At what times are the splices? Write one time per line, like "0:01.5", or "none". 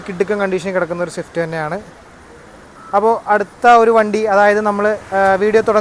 none